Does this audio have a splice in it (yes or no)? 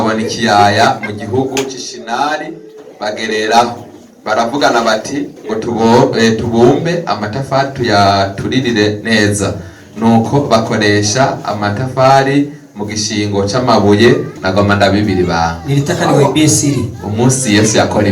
yes